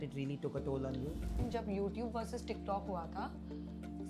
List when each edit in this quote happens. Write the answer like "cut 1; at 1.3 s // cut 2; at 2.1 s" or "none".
cut 1; at 1.4 s